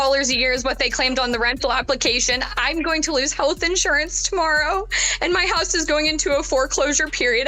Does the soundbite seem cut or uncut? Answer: uncut